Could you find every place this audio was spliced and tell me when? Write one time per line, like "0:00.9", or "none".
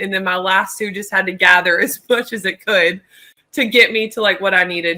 none